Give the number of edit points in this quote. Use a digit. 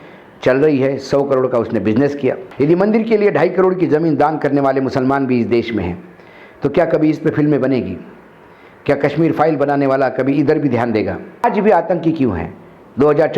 2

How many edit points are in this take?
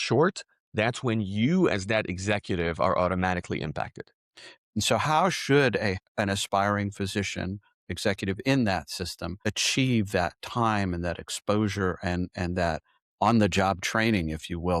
3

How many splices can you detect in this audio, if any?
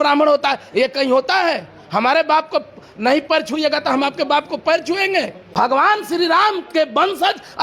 1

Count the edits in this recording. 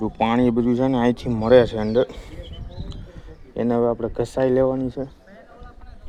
0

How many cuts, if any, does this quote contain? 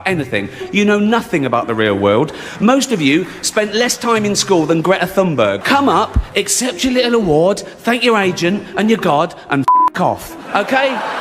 1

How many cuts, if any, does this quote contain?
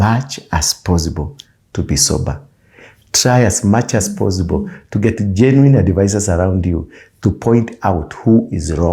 0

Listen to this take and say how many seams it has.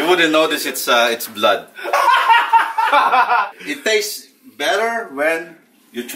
1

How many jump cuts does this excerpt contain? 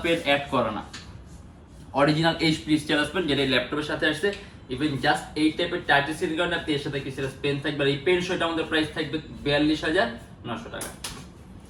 0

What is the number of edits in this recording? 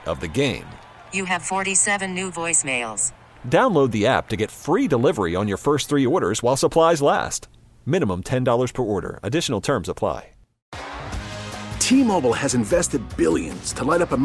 1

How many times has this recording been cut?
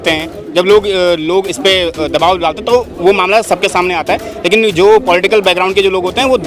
0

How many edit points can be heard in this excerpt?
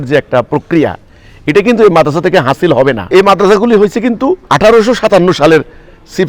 2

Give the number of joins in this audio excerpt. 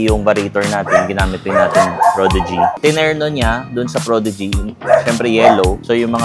1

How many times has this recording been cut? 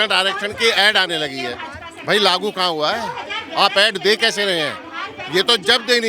0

